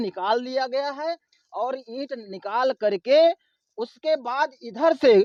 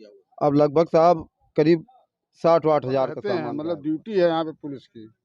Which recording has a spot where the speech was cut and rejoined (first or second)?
second